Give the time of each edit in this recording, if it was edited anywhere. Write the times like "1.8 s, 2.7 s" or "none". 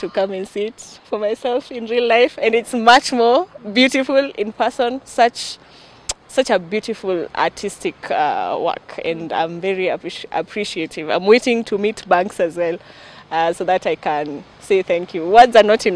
none